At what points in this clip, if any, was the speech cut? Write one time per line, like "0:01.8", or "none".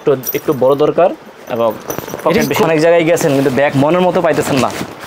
0:02.6